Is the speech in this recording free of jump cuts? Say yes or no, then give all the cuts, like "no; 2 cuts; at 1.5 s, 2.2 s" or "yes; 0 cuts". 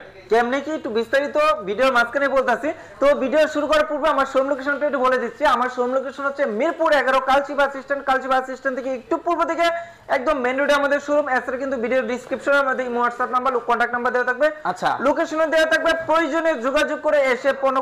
yes; 0 cuts